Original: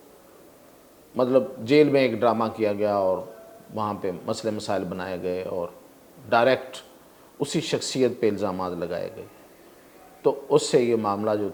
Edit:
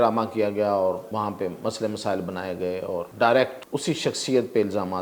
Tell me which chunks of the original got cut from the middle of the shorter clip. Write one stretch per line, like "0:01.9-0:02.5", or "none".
0:03.3-0:03.7
0:05.7-0:06.2
0:06.8-0:07.3